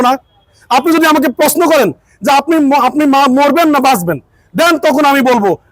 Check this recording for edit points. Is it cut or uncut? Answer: uncut